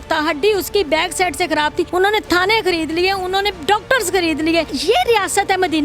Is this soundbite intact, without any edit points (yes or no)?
no